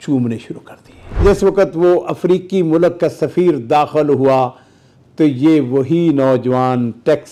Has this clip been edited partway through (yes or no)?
yes